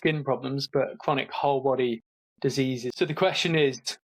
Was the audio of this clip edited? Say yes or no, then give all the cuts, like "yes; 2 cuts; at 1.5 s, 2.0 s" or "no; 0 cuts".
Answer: yes; 1 cut; at 2.9 s